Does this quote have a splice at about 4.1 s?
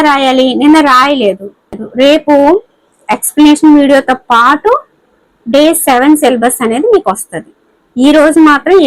no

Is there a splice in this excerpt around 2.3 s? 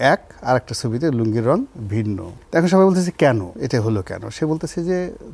yes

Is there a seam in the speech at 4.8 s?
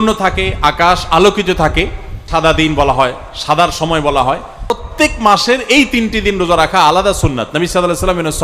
yes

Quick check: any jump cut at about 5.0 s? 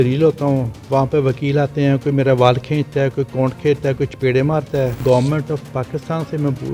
yes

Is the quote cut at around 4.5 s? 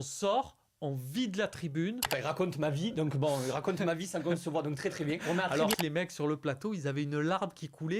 no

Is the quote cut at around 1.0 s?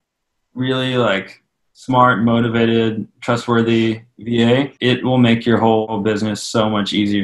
no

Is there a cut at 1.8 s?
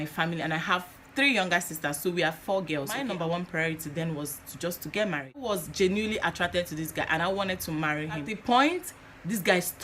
no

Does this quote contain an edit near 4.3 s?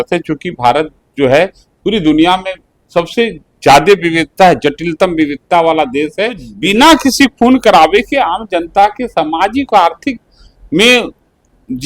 no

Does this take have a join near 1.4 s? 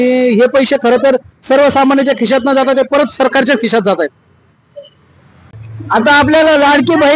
no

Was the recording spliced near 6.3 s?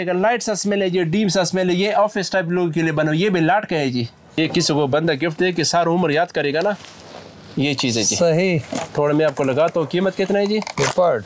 no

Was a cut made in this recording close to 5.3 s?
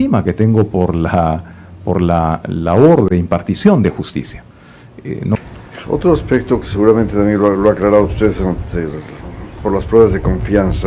yes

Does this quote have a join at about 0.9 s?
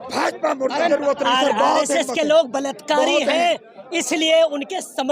yes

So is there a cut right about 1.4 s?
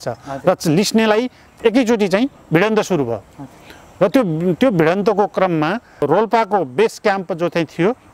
yes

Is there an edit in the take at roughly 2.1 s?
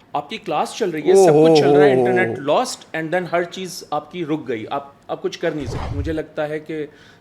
no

